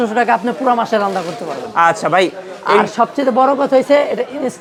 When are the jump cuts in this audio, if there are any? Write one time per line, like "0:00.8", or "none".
none

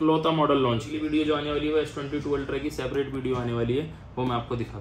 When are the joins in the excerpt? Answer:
0:01.0

